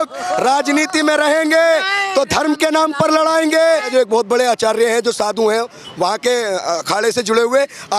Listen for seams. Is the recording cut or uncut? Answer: cut